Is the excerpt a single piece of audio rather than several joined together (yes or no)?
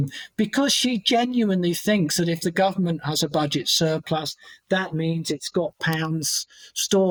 yes